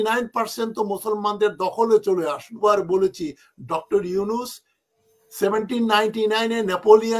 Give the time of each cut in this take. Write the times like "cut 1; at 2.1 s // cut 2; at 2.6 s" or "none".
cut 1; at 2.5 s